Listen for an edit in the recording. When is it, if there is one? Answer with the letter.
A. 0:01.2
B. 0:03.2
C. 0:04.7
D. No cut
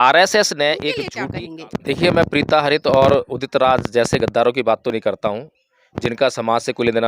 A